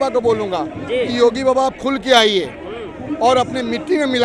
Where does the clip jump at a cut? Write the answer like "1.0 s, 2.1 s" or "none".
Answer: none

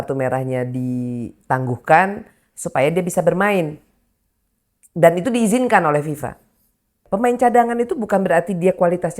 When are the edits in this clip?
7.0 s

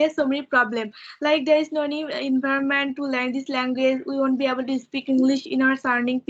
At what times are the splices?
none

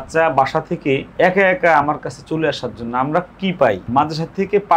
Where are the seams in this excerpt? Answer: 1.1 s, 3.8 s

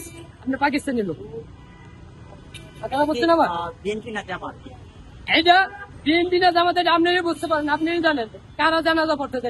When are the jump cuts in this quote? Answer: none

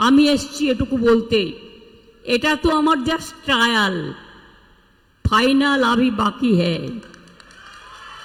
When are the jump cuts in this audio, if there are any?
none

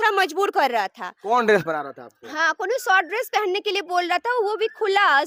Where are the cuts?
none

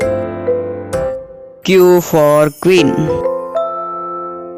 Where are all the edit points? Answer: none

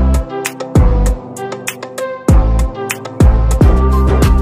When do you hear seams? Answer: 3.5 s

